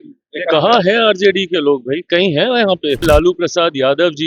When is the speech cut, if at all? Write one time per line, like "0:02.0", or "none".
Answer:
0:03.0